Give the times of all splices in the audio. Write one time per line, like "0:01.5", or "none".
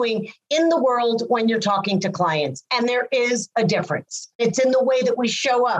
0:04.4